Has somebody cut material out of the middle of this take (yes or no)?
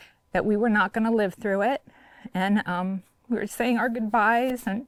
no